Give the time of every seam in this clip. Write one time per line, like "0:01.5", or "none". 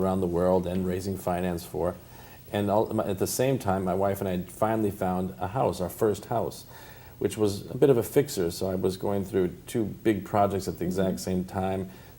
0:10.8